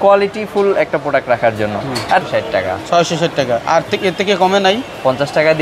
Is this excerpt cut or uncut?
cut